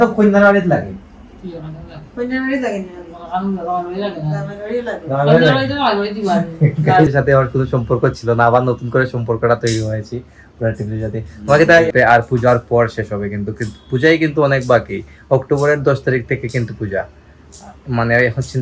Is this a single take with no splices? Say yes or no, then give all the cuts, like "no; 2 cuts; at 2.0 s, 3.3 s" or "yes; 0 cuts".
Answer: no; 2 cuts; at 7.1 s, 11.9 s